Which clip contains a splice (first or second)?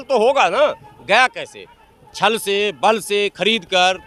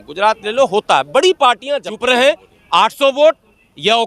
second